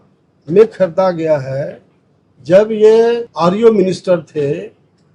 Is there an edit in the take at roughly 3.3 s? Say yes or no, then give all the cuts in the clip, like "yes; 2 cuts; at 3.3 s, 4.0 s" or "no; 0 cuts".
yes; 1 cut; at 3.3 s